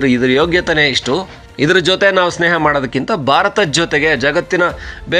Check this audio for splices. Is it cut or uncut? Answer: cut